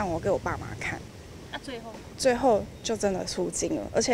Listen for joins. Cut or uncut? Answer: uncut